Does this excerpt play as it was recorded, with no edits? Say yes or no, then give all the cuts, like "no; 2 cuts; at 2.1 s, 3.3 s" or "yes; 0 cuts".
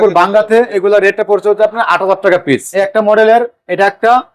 no; 1 cut; at 2.7 s